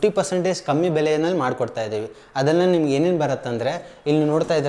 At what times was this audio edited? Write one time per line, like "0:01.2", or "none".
none